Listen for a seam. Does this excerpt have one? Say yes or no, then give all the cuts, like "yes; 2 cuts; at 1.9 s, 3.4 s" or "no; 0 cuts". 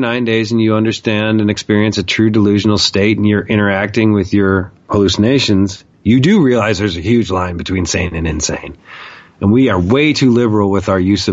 yes; 1 cut; at 4.8 s